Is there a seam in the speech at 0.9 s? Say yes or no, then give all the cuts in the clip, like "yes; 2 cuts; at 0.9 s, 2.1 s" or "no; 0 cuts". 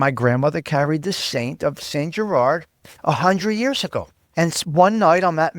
no; 1 cut; at 4.2 s